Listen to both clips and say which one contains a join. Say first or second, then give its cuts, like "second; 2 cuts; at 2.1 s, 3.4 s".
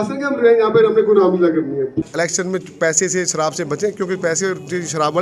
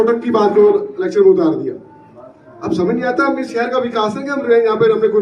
first; 1 cut; at 2.1 s